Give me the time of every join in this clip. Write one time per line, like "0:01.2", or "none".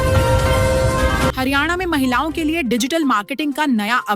0:01.3